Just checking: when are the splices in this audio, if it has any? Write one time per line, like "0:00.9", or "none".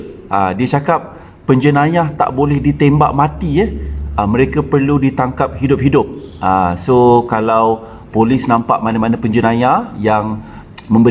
none